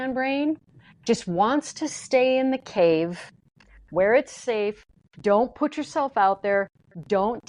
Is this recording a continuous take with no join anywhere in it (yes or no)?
yes